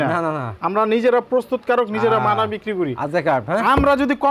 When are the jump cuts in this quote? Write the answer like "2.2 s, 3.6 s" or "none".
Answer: none